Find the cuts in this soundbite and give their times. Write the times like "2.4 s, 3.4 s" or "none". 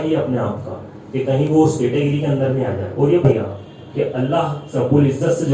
3.3 s